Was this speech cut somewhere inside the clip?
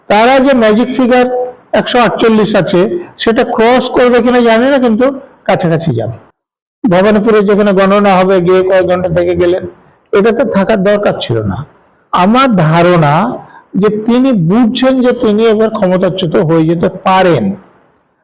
yes; 1 cut; at 6.2 s

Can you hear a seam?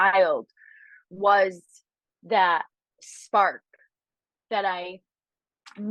no; 0 cuts

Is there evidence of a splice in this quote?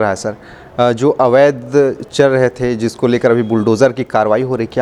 no; 0 cuts

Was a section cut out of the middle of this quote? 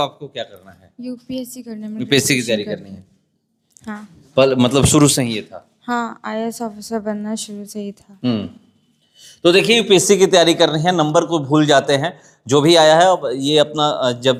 no; 0 cuts

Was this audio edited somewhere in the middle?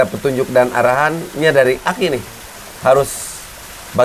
no; 0 cuts

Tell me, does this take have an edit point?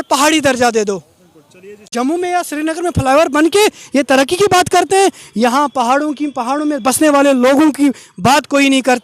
yes; 1 cut; at 1.9 s

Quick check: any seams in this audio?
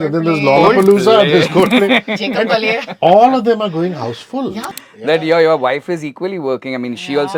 yes; 1 cut; at 4.7 s

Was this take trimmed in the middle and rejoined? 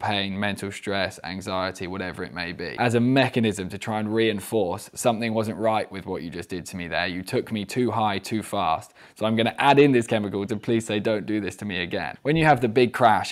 yes; 2 cuts; at 2.7 s, 12.1 s

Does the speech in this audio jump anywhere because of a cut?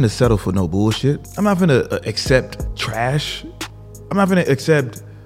yes; 2 cuts; at 1.3 s, 2.6 s

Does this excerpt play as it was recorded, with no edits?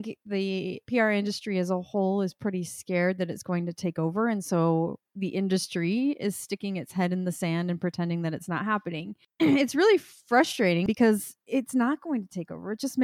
no; 2 cuts; at 9.1 s, 10.9 s

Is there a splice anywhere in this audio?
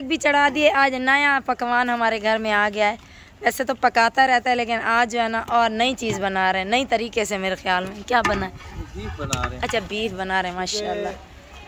no; 0 cuts

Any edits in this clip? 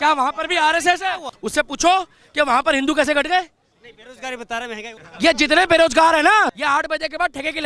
yes; 3 cuts; at 1.3 s, 4.9 s, 6.5 s

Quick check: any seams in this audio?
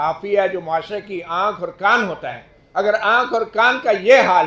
no; 0 cuts

